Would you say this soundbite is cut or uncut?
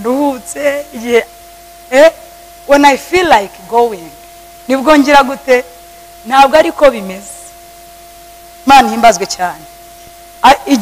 uncut